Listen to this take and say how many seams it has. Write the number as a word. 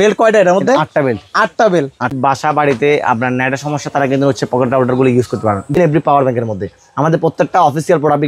two